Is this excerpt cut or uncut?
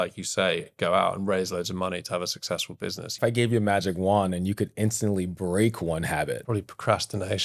cut